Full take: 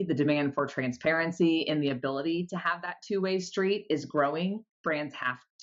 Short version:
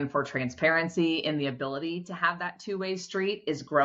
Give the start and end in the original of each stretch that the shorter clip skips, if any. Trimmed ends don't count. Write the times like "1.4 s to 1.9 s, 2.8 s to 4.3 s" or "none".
none